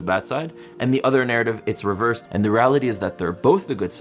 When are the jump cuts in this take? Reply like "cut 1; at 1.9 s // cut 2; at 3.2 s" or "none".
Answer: cut 1; at 2.2 s